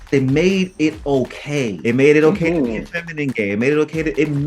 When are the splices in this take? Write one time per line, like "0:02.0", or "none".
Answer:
0:01.8